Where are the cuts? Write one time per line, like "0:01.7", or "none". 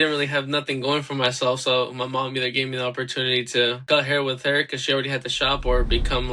0:03.8